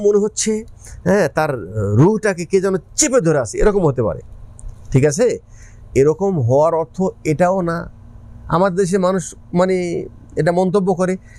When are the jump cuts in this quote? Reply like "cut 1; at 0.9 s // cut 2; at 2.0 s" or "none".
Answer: none